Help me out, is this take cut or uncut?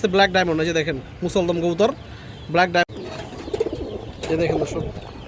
cut